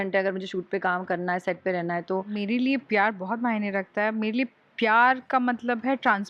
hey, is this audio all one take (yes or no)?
no